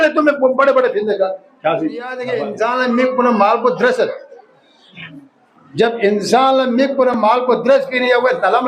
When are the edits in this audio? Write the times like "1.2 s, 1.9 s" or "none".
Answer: 2.3 s